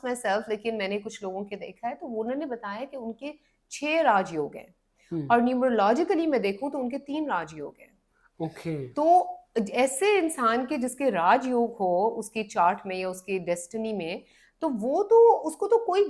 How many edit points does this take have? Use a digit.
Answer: 0